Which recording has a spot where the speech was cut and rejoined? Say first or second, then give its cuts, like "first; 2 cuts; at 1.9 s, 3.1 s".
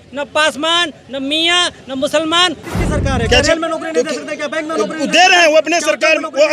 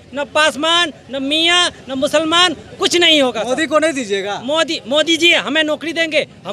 first; 1 cut; at 2.7 s